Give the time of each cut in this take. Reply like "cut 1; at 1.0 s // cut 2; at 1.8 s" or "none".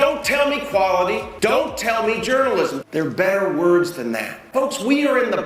cut 1; at 1.3 s // cut 2; at 2.8 s // cut 3; at 4.5 s